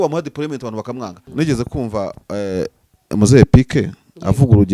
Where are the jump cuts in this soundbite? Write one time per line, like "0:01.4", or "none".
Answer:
0:01.2